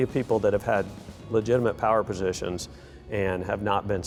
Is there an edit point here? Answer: no; 0 cuts

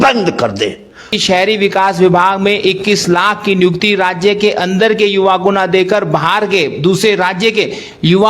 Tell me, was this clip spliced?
yes; 1 cut; at 1.2 s

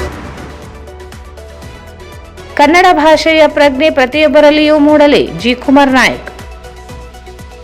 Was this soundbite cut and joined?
yes; 1 cut; at 2.5 s

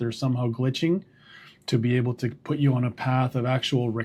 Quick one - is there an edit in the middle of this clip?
no; 0 cuts

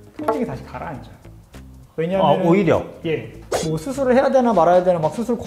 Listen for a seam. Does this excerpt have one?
yes; 1 cut; at 3.3 s

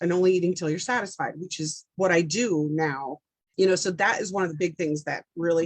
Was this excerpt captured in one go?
no; 1 cut; at 3.5 s

